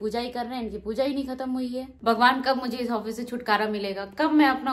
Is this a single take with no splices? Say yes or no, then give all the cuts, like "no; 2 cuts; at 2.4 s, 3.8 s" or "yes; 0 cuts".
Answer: no; 1 cut; at 2.0 s